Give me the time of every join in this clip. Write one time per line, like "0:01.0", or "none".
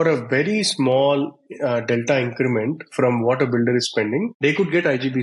0:04.3